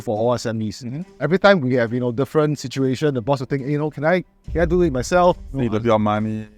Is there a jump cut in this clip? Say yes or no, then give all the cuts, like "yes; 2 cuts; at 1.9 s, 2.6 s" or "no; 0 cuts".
no; 0 cuts